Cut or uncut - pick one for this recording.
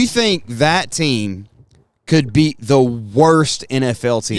uncut